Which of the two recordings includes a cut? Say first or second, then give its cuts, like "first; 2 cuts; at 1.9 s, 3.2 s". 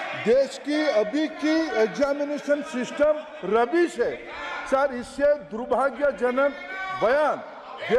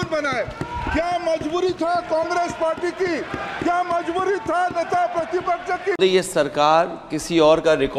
second; 1 cut; at 6.0 s